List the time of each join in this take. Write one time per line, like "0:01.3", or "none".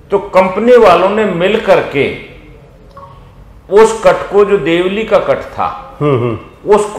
none